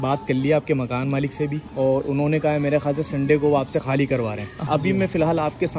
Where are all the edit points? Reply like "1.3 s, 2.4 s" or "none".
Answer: 1.6 s, 4.6 s